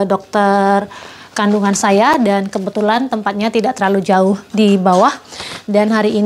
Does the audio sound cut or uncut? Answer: uncut